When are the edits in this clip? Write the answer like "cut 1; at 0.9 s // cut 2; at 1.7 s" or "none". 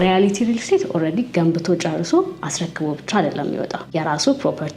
cut 1; at 3.8 s